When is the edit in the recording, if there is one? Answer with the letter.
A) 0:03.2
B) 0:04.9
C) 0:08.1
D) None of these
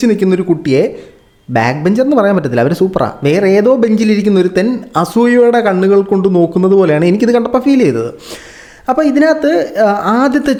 D